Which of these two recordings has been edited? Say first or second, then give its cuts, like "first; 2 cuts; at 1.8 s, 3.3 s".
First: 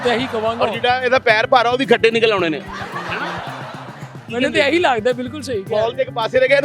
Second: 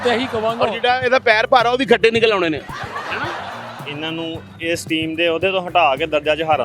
second; 1 cut; at 3.9 s